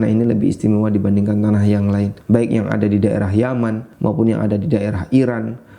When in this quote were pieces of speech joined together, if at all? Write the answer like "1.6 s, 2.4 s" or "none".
2.2 s, 3.9 s